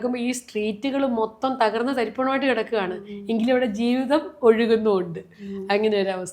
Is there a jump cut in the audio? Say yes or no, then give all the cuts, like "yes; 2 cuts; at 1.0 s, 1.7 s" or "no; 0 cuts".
no; 0 cuts